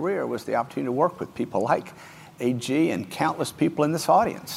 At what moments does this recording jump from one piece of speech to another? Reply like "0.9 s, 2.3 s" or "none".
none